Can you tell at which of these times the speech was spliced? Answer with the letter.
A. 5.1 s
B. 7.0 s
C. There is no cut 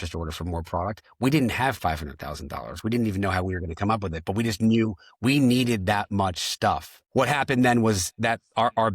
B